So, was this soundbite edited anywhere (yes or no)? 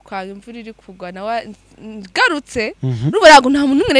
no